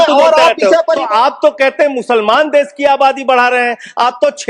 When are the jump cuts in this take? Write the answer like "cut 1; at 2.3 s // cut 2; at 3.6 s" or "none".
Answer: cut 1; at 1.0 s